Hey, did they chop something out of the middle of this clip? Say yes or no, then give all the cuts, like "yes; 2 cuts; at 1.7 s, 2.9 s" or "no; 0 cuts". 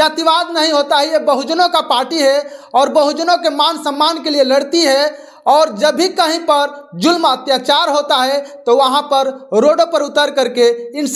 no; 0 cuts